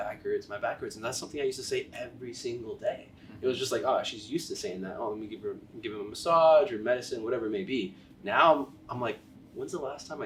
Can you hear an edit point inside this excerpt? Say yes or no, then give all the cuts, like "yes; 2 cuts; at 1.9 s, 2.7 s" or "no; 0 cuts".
no; 0 cuts